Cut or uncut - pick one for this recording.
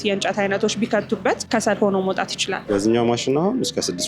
cut